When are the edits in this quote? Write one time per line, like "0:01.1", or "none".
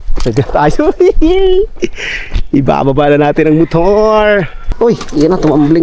0:04.6